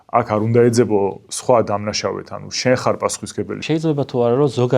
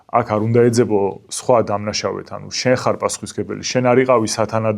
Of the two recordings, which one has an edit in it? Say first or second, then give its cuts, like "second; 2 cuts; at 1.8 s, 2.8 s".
first; 1 cut; at 3.6 s